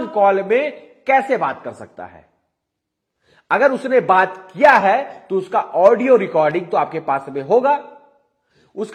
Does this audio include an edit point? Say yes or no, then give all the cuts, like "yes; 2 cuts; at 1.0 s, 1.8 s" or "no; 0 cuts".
no; 0 cuts